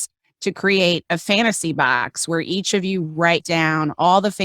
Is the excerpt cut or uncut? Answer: cut